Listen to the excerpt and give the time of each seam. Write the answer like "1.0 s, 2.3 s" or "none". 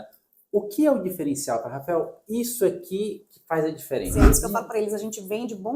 4.1 s